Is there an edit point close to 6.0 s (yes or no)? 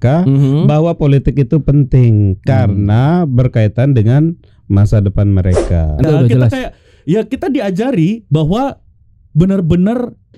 yes